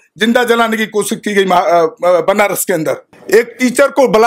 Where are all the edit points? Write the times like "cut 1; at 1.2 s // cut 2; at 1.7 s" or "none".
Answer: cut 1; at 3.1 s